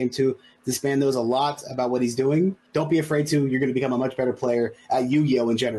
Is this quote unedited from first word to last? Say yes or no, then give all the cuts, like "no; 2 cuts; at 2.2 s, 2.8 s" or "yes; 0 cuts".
no; 1 cut; at 2.6 s